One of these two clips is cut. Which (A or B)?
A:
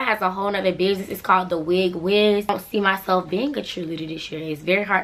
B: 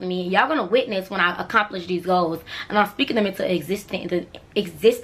A